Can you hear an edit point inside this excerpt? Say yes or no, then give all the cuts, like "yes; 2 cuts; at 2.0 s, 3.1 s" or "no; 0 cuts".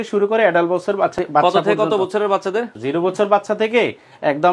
yes; 2 cuts; at 1.1 s, 2.7 s